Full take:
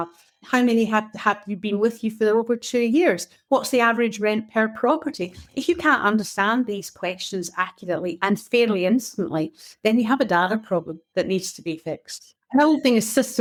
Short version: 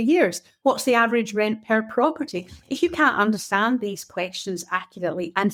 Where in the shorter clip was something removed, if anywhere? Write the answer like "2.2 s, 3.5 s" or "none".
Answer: none